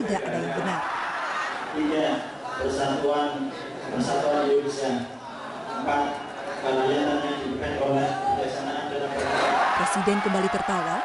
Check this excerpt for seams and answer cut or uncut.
cut